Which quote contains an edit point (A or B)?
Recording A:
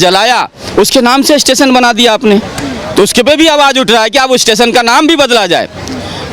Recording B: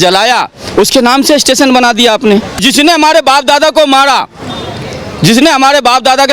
B